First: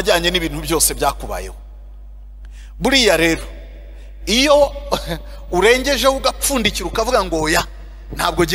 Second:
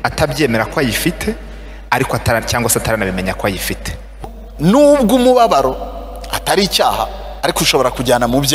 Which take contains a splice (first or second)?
second